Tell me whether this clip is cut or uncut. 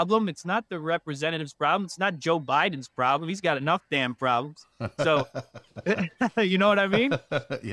uncut